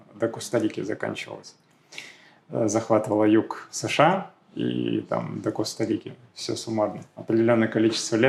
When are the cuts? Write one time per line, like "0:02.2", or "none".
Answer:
none